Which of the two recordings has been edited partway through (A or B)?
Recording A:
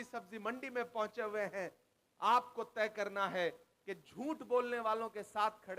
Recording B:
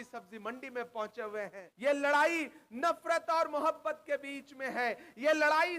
B